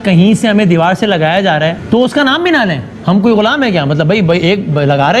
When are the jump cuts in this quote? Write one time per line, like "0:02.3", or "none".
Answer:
none